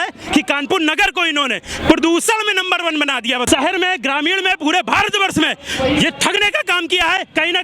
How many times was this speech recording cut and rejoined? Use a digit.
1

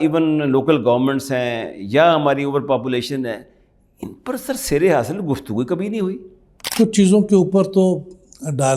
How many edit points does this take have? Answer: 1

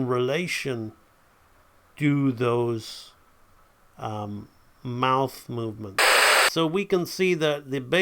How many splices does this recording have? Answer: 1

